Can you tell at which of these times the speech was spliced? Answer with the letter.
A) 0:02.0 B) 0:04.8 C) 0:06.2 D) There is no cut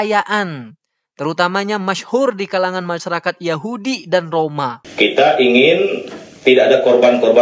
B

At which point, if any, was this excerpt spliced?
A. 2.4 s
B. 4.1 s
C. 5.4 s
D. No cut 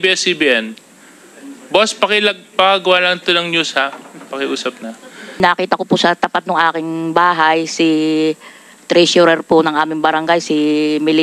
C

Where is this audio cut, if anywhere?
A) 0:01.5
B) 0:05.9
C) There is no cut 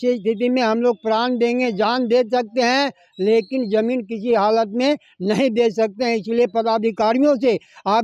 C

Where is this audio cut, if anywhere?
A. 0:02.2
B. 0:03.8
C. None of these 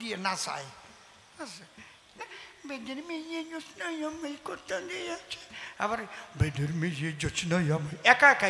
A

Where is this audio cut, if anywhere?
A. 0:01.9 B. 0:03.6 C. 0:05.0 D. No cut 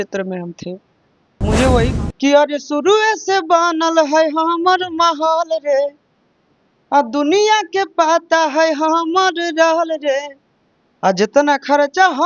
A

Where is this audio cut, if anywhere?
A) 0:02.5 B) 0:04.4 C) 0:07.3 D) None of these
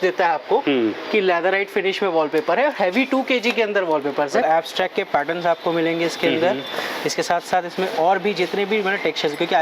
B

